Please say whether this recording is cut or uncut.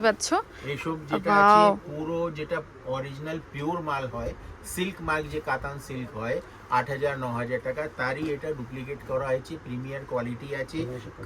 uncut